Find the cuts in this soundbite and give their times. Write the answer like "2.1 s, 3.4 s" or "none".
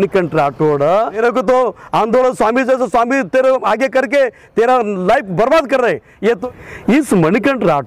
1.2 s, 6.4 s